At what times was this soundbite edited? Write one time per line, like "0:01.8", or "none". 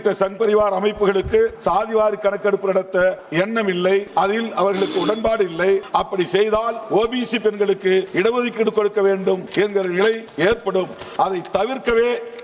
0:01.6
0:03.2
0:04.1
0:05.9
0:06.8
0:08.1
0:09.5
0:10.3